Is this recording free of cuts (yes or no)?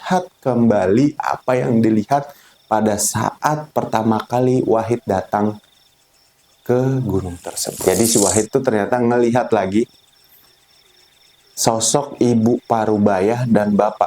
no